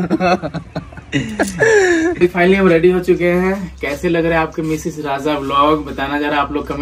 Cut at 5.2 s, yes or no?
no